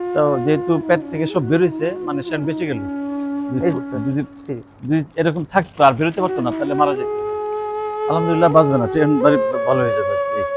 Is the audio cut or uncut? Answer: uncut